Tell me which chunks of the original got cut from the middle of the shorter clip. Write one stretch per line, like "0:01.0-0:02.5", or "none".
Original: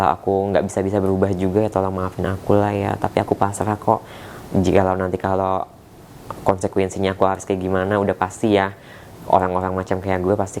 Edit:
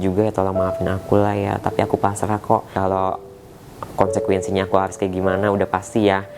0:04.1-0:05.2